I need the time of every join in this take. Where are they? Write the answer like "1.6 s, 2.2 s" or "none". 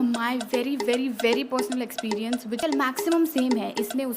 2.6 s